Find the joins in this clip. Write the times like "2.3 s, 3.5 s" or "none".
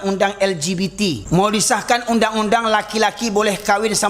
1.2 s